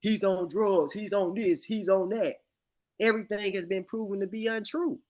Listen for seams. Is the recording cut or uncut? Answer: uncut